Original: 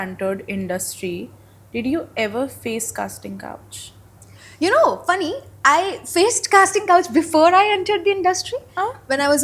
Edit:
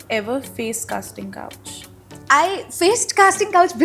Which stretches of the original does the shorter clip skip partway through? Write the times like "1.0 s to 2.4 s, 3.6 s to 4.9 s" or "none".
4.2 s to 5.5 s